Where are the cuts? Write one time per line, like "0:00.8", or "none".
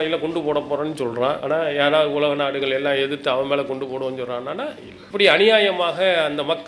0:01.4
0:04.9